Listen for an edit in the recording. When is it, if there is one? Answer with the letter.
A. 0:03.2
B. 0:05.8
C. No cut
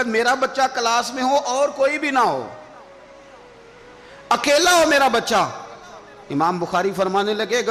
C